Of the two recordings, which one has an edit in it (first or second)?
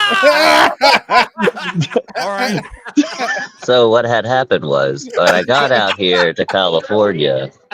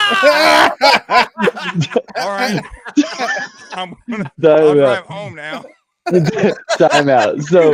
first